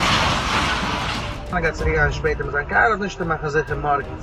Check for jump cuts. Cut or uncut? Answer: uncut